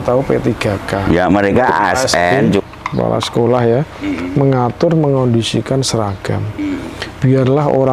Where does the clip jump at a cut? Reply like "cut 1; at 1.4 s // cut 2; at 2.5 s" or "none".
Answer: cut 1; at 2.6 s